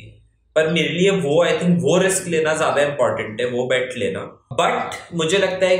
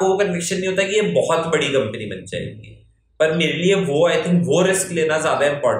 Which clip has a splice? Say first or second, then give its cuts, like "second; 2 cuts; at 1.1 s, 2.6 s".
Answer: first; 1 cut; at 4.4 s